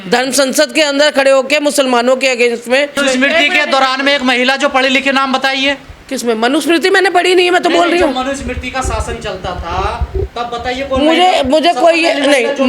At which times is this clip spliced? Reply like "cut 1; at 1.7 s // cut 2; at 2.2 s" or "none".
cut 1; at 3.0 s